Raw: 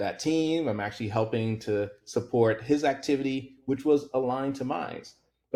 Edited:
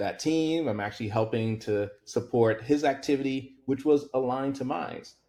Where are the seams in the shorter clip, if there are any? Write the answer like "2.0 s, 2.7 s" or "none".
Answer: none